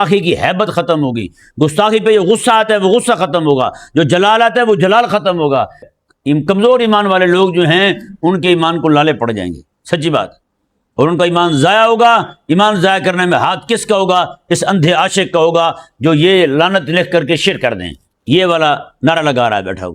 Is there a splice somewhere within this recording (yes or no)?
yes